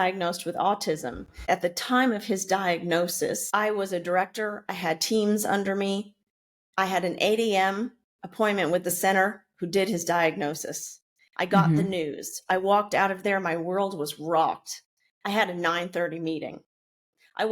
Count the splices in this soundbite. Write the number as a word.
two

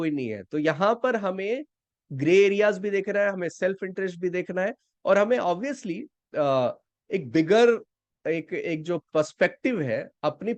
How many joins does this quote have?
zero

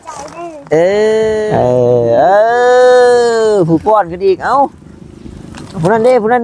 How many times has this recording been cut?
one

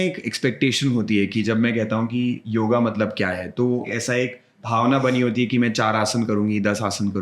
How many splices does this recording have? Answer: one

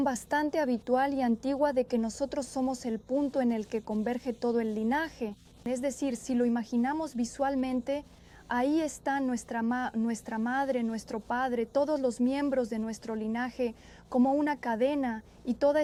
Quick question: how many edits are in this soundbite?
zero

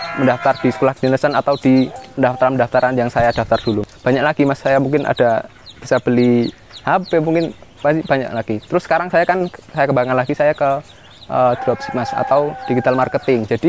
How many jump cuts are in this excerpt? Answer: two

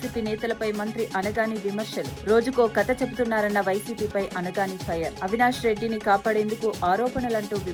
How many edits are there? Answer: zero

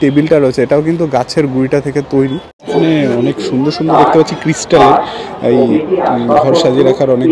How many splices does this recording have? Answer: one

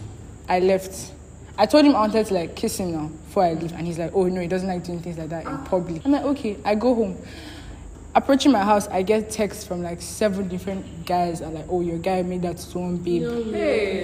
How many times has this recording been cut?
one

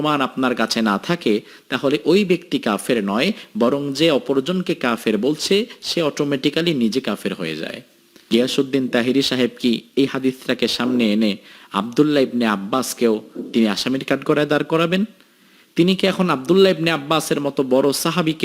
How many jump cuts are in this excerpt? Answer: one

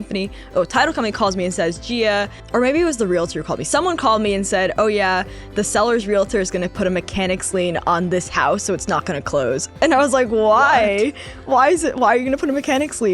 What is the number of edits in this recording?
one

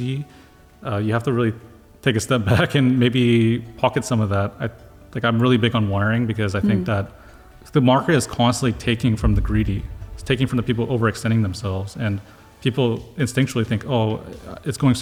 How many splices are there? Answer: zero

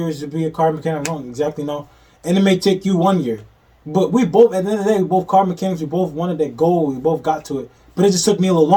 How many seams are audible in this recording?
zero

